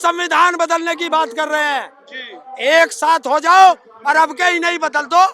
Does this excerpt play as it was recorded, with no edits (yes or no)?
yes